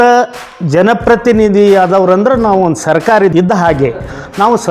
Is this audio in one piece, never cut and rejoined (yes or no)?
no